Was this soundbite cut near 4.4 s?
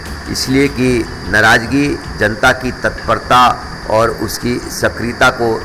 no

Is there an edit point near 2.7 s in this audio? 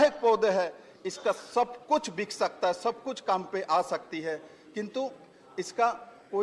no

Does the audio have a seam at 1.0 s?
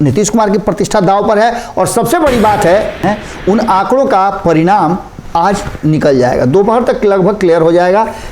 no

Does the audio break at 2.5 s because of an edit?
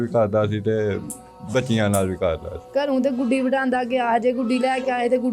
yes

